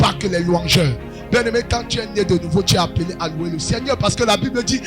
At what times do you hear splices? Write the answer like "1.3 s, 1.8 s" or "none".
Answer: none